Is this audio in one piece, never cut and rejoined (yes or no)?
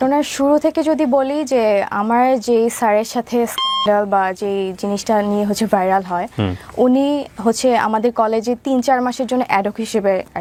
yes